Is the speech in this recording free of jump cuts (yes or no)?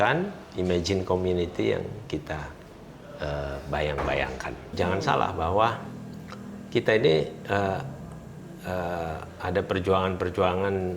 no